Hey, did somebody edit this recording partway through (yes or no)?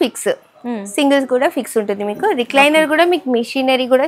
no